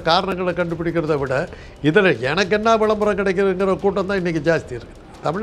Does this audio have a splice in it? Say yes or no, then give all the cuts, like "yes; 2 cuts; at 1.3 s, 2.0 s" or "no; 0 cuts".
no; 0 cuts